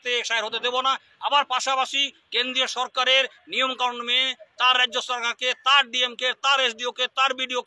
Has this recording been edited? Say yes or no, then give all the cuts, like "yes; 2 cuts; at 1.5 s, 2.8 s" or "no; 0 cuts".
no; 0 cuts